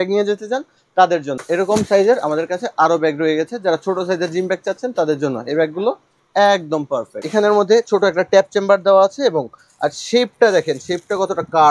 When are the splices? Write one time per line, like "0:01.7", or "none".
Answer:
0:01.3
0:07.1

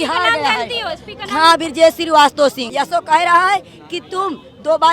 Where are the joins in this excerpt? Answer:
0:02.6

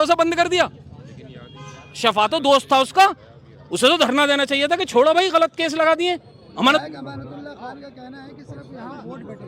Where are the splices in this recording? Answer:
0:06.8

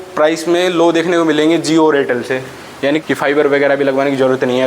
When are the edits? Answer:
0:03.0

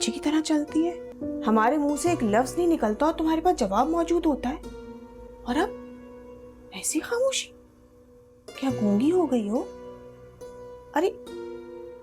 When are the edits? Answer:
0:01.1

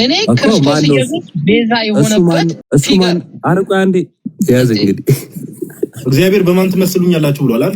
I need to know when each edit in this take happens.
0:02.6
0:04.2

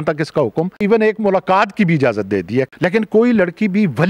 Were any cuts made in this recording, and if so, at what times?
0:00.8
0:02.7

